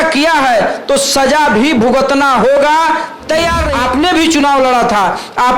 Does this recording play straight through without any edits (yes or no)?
no